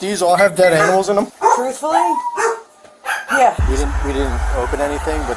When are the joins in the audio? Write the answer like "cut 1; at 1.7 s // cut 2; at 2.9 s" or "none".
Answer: cut 1; at 1.3 s // cut 2; at 3.6 s